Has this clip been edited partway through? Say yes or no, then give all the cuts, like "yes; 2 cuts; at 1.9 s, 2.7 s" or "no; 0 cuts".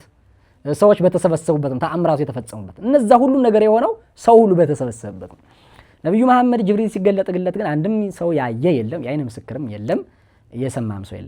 no; 0 cuts